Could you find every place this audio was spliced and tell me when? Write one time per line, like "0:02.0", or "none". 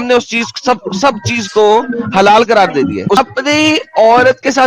0:03.2